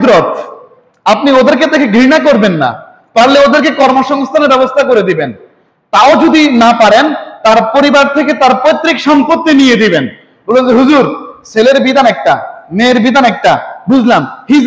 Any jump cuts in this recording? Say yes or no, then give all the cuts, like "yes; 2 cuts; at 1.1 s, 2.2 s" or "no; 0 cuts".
no; 0 cuts